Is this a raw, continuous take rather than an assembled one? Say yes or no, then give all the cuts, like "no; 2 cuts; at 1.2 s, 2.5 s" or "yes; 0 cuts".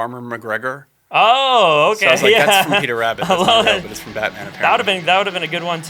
yes; 0 cuts